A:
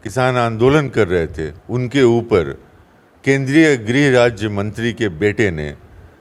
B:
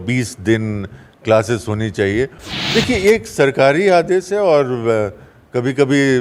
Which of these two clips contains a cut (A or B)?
B